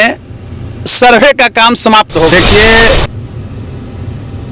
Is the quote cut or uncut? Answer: cut